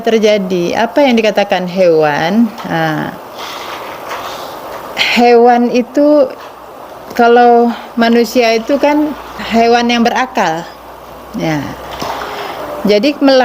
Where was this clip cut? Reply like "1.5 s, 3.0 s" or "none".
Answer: 9.4 s